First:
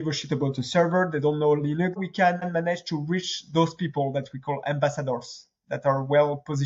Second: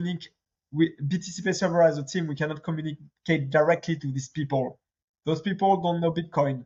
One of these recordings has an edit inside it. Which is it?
first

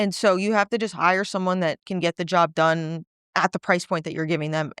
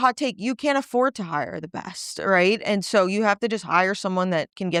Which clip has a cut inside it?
first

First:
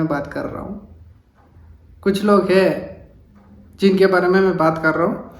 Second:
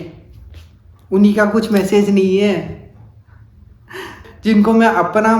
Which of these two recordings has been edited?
second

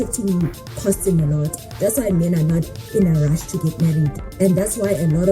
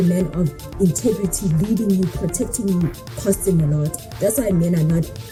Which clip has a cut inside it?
first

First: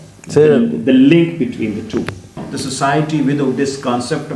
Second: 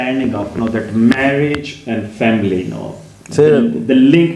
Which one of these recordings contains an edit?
first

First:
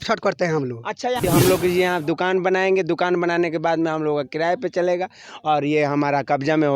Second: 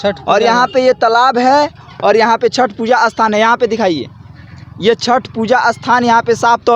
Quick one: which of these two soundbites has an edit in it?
first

